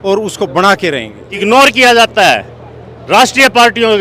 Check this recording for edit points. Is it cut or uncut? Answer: cut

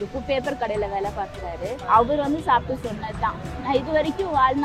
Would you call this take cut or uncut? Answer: cut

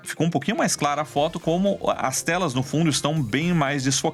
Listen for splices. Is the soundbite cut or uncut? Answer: uncut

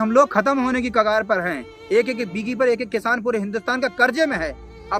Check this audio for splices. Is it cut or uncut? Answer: cut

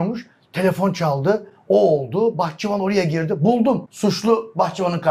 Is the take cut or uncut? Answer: cut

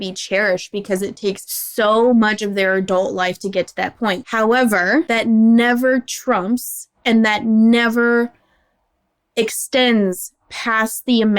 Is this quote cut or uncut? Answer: cut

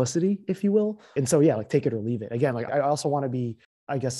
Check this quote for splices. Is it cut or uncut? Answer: cut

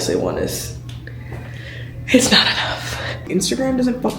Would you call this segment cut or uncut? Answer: cut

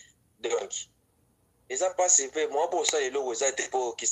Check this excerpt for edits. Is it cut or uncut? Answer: uncut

